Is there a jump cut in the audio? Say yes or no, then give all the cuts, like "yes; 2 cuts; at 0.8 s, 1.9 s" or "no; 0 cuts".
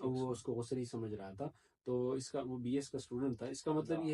no; 0 cuts